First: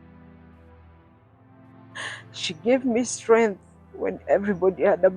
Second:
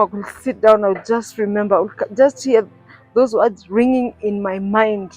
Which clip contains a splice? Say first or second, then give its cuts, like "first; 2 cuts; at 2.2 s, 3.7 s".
first; 1 cut; at 2.0 s